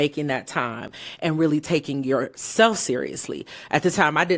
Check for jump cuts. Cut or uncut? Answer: uncut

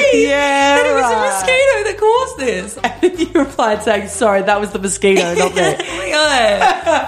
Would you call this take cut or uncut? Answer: cut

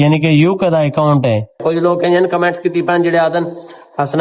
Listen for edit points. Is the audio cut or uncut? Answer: cut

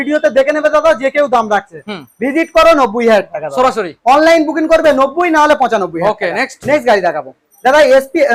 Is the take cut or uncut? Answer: uncut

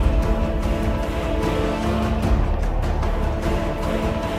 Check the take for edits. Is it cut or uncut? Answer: uncut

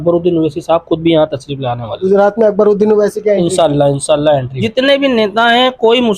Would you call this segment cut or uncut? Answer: cut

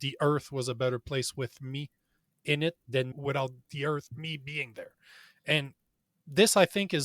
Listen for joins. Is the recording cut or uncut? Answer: cut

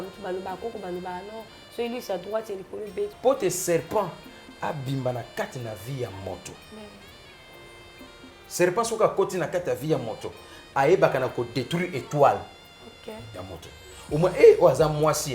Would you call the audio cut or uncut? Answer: cut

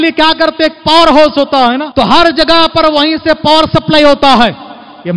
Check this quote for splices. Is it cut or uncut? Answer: cut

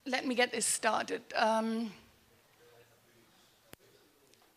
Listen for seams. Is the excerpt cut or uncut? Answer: uncut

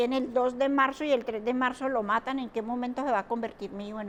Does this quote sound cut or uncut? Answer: uncut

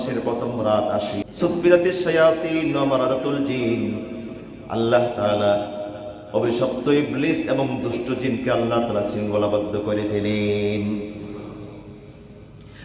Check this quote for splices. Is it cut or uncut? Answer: cut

